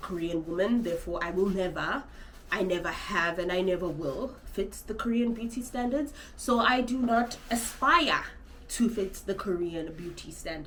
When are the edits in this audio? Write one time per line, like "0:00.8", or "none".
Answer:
none